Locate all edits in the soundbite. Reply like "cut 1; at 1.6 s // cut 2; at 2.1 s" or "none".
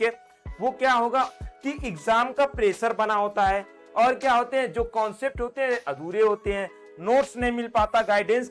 cut 1; at 1.4 s